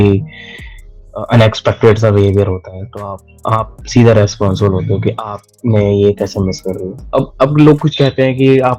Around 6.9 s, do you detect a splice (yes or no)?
yes